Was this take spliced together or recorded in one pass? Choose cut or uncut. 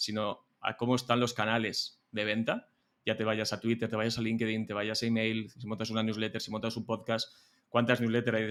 uncut